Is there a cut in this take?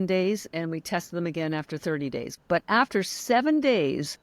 yes; 1 cut; at 2.3 s

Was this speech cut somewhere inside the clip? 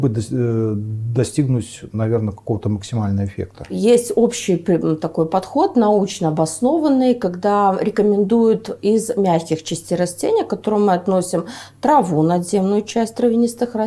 no; 0 cuts

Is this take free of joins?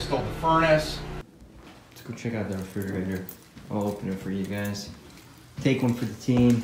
no; 1 cut; at 1.4 s

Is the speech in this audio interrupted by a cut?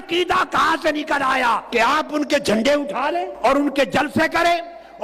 yes; 2 cuts; at 1.6 s, 3.3 s

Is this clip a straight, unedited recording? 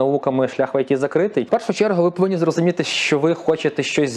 no; 1 cut; at 1.5 s

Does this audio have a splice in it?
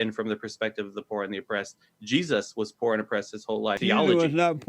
yes; 1 cut; at 3.8 s

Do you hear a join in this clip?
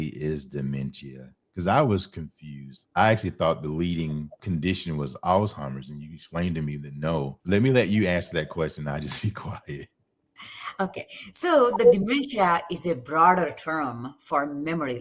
yes; 2 cuts; at 2.8 s, 4.4 s

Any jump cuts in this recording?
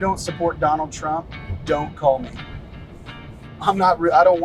no; 0 cuts

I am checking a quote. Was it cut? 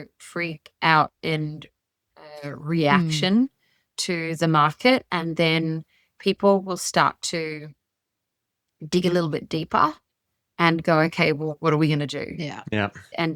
no; 0 cuts

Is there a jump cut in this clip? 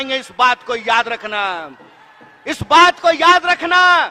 no; 0 cuts

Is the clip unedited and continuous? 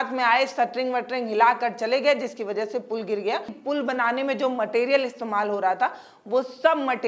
no; 1 cut; at 3.5 s

